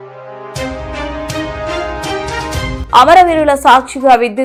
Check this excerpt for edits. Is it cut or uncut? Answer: uncut